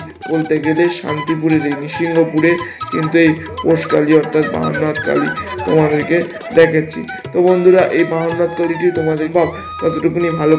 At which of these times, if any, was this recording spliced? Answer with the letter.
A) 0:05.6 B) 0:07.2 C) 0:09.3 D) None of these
C